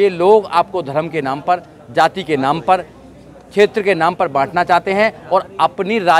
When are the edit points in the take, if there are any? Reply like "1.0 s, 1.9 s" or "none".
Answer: none